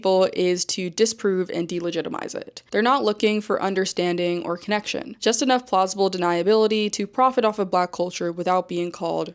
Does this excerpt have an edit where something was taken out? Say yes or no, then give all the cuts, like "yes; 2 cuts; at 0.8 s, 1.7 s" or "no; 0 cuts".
yes; 1 cut; at 2.6 s